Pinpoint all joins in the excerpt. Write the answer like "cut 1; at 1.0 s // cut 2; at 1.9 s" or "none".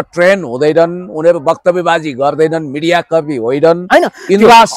none